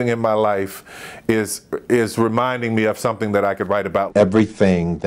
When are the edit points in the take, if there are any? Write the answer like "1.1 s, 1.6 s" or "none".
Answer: 4.1 s